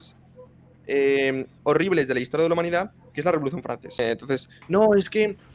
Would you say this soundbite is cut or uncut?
cut